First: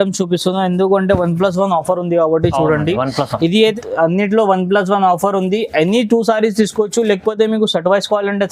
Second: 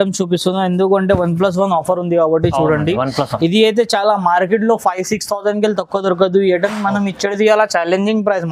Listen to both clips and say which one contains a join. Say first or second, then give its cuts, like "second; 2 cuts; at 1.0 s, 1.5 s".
first; 1 cut; at 3.7 s